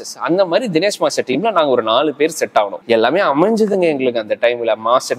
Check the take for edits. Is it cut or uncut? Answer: cut